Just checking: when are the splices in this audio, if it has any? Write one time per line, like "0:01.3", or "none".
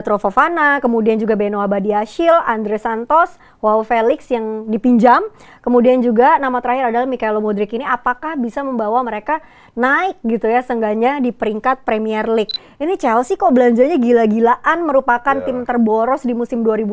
0:12.6